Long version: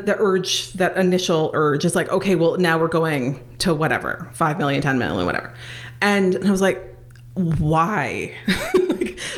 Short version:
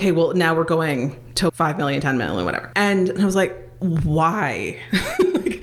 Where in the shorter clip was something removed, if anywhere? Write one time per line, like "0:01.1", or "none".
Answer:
0:01.5
0:02.6
0:03.6